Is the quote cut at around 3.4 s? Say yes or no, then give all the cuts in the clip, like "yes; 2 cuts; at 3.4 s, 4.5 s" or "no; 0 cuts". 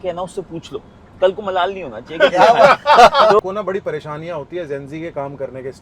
yes; 1 cut; at 3.4 s